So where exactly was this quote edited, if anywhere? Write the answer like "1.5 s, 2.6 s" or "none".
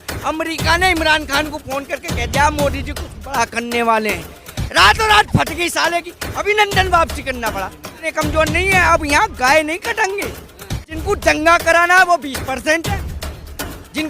8.1 s, 10.9 s

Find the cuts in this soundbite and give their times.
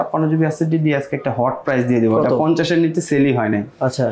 none

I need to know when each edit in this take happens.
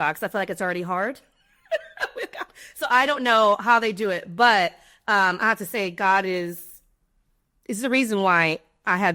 none

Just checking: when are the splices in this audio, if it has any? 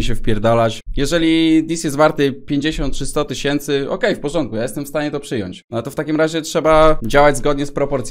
0.8 s, 5.5 s

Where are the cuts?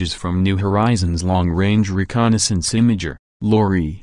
2.3 s

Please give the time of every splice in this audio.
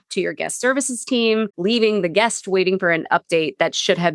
1.5 s

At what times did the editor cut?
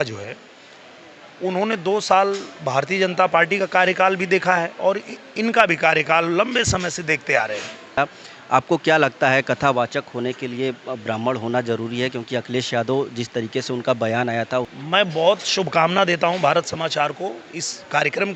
8.0 s, 14.7 s

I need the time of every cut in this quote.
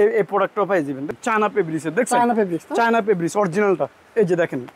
1.1 s

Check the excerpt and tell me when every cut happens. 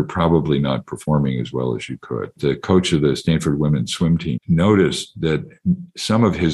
2.4 s, 4.4 s

